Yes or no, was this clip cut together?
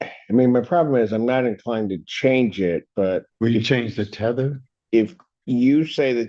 yes